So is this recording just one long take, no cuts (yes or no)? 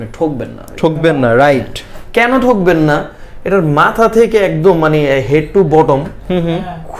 yes